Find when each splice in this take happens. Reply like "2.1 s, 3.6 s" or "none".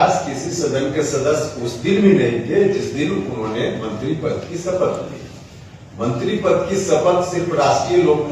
none